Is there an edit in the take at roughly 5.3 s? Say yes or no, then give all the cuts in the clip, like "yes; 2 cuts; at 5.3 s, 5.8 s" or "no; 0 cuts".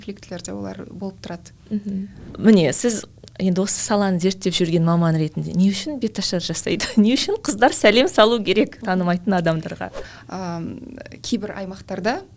no; 2 cuts; at 2.2 s, 10.1 s